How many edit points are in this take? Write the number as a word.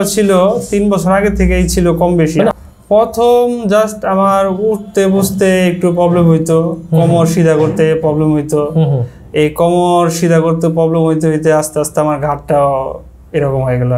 one